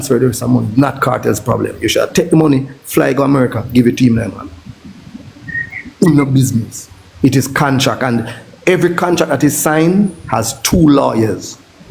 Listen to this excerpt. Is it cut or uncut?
uncut